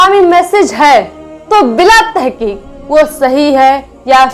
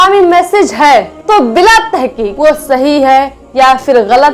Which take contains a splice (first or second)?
second